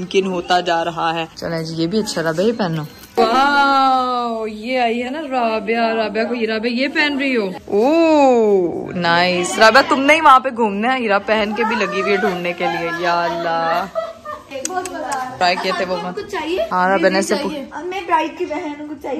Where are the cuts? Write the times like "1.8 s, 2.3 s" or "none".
none